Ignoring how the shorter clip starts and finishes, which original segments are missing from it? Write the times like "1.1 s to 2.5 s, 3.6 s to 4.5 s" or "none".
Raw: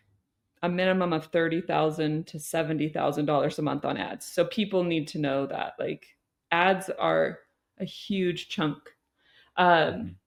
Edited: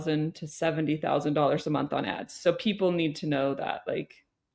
none